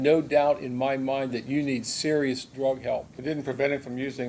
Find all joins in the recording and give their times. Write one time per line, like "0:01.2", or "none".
0:03.1